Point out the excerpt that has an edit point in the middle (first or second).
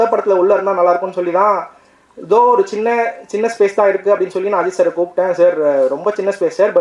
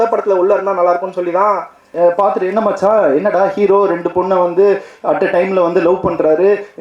second